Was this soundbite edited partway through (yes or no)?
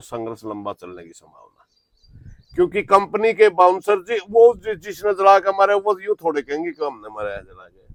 no